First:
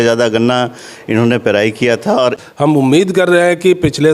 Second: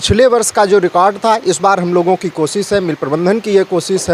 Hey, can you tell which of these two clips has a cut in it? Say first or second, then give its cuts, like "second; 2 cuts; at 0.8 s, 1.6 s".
first; 1 cut; at 2.4 s